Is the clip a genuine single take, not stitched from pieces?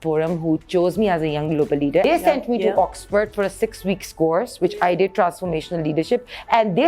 no; 1 cut; at 2.1 s

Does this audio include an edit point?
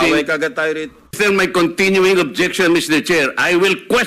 yes; 1 cut; at 1.0 s

